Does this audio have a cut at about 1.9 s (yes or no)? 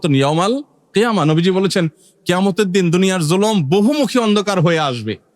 no